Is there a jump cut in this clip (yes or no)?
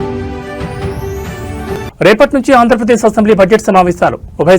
yes